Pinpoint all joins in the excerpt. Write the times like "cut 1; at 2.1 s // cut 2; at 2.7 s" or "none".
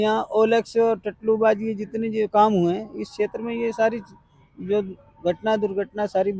none